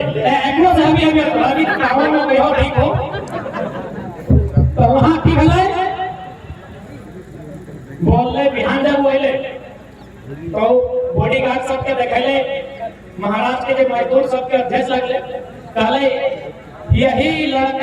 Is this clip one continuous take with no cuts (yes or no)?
yes